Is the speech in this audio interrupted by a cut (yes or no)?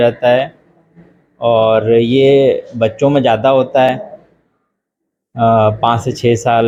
no